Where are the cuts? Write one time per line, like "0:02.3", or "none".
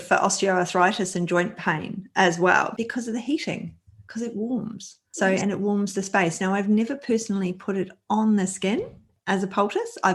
none